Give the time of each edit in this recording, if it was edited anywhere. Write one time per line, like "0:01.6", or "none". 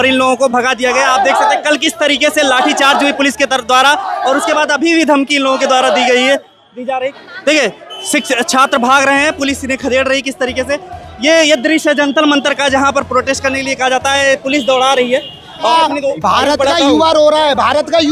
0:07.2
0:15.7